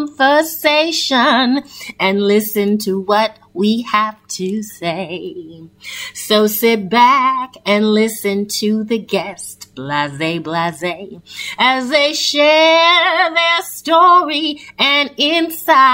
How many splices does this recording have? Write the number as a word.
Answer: zero